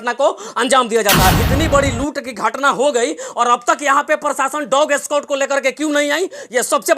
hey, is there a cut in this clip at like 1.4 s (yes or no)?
yes